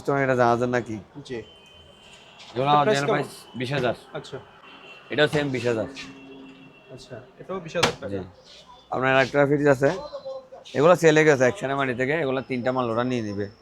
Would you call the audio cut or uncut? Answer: uncut